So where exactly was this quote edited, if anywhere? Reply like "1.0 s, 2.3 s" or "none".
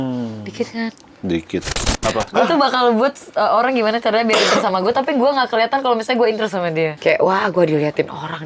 1.9 s, 6.9 s